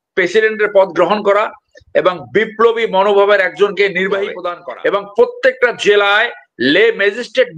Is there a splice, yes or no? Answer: yes